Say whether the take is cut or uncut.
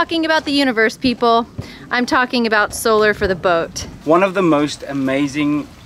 uncut